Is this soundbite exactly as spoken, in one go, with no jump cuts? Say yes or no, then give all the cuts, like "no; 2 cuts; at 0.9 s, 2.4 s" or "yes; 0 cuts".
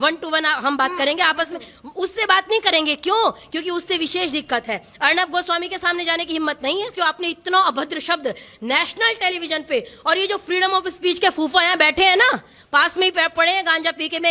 no; 1 cut; at 6.9 s